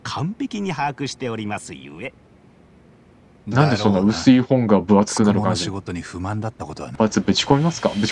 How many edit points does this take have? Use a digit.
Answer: 1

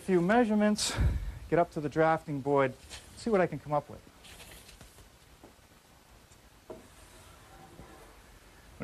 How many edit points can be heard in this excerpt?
0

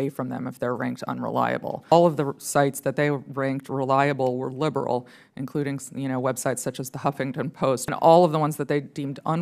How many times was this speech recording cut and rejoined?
2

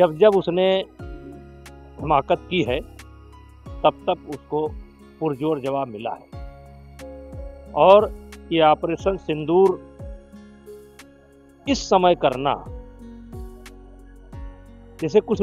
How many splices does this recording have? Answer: 2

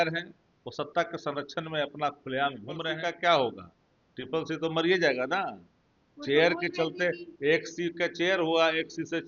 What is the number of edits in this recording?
1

